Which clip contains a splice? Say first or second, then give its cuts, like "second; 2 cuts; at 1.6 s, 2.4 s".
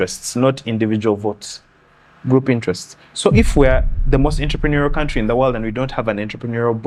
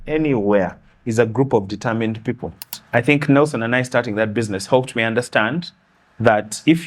second; 1 cut; at 2.8 s